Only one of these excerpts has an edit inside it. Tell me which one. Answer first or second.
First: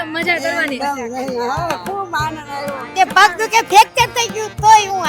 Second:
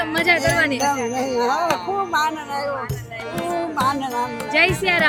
first